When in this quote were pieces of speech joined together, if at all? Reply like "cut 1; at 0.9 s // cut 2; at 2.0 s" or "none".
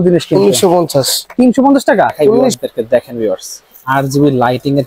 cut 1; at 2.5 s